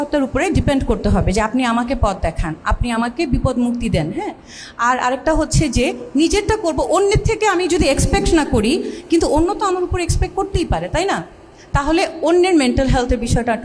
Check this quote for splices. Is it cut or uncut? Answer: uncut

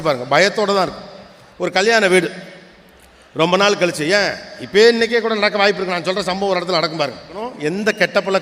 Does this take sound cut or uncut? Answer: cut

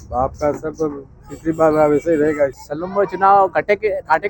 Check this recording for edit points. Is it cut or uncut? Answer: cut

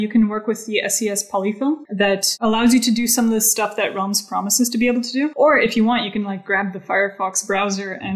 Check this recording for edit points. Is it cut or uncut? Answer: cut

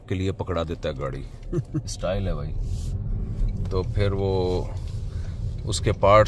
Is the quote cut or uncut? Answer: uncut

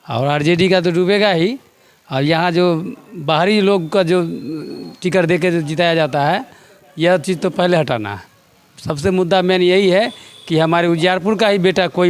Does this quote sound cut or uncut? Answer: uncut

